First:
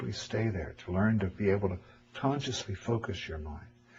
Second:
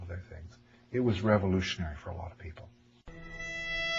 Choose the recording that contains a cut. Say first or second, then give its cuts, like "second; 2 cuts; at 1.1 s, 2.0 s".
first; 1 cut; at 2.8 s